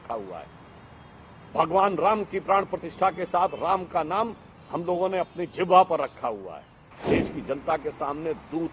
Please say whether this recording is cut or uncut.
cut